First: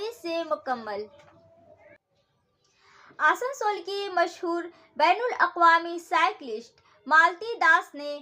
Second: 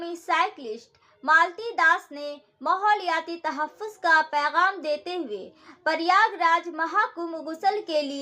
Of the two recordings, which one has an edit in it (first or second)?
first